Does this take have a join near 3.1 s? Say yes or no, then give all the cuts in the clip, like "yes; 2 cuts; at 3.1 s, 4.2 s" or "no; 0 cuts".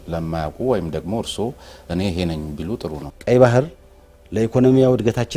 yes; 1 cut; at 3.1 s